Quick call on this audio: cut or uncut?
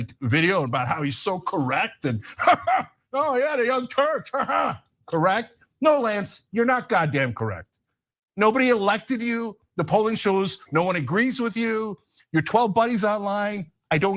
cut